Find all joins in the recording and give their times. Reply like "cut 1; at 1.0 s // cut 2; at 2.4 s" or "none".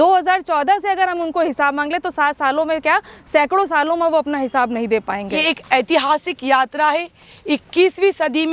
cut 1; at 5.4 s